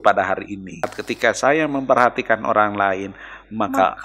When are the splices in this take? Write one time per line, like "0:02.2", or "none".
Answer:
0:01.0